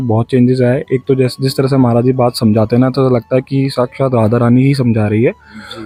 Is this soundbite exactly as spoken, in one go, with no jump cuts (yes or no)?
yes